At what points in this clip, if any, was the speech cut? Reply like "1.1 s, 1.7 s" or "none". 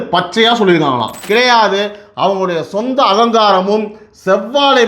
1.2 s